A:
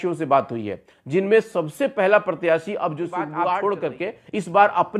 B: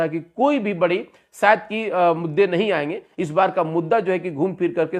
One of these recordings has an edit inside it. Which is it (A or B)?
A